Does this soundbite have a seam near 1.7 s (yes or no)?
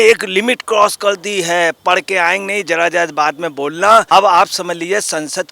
no